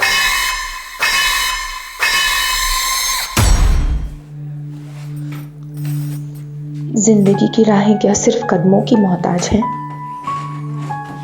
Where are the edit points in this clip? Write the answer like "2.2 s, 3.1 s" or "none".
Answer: 4.0 s